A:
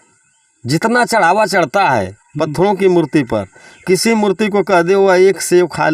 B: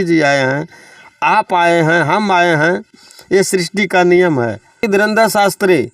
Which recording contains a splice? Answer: B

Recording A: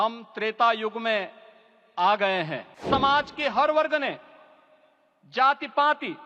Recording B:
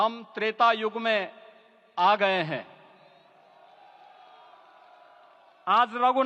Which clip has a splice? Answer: A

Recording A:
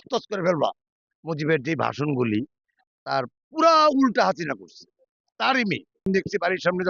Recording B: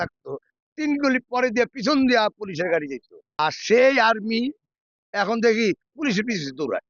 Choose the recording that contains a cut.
A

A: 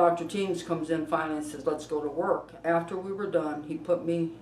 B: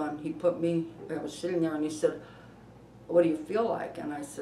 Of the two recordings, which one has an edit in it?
A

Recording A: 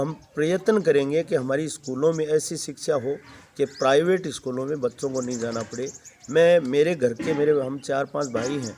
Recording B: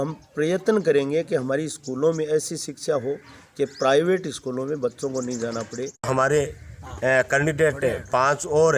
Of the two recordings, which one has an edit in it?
B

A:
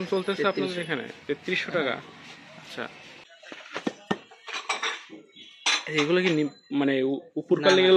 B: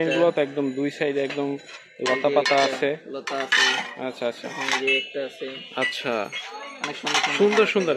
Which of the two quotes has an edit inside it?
A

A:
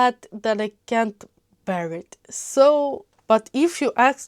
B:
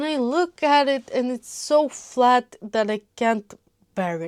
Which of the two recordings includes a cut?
A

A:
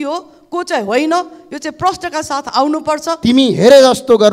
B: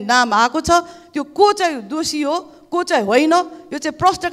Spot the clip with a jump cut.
A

